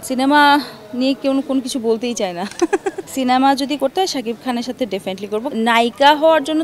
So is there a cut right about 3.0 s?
yes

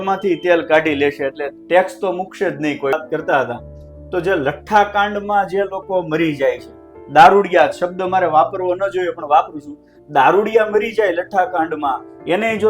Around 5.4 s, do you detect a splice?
no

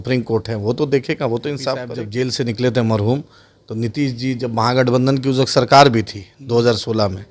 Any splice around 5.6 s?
no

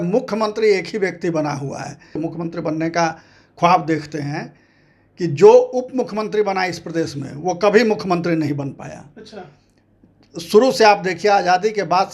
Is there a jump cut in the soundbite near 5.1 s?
no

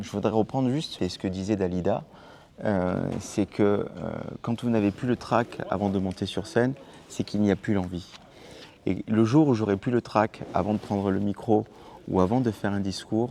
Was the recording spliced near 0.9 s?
yes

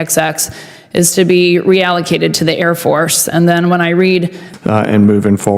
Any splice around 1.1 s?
no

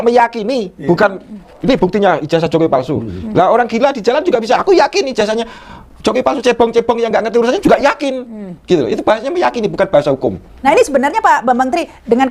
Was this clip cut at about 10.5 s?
yes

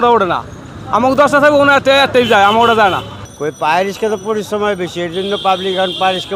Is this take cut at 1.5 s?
no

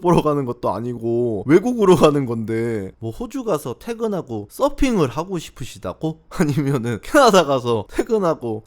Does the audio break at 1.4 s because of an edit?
yes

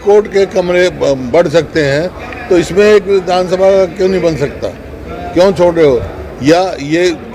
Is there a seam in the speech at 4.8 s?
no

